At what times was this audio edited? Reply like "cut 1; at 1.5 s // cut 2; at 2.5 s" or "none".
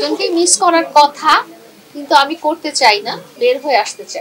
cut 1; at 3.2 s